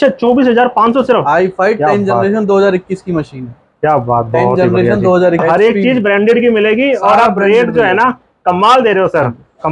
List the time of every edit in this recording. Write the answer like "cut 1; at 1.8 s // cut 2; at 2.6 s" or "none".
cut 1; at 5.4 s